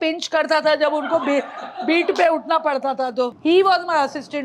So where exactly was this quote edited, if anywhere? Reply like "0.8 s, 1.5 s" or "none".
3.3 s